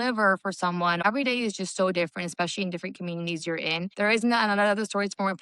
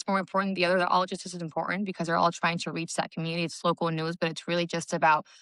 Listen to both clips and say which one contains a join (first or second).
first